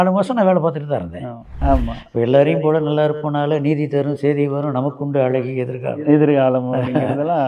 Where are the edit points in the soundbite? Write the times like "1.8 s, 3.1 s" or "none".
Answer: 1.6 s